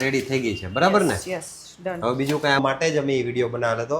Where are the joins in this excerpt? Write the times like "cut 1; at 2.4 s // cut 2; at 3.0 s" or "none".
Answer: cut 1; at 2.6 s